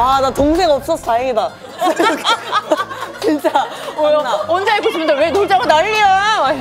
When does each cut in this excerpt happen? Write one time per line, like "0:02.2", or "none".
none